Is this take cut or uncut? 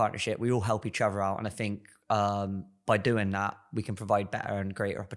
uncut